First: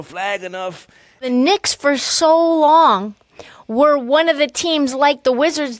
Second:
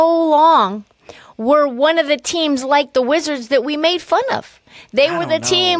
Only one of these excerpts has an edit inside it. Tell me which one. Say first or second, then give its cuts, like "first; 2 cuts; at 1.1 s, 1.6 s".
first; 1 cut; at 1.3 s